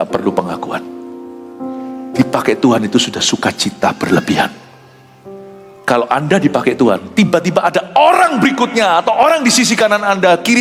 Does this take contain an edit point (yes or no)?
no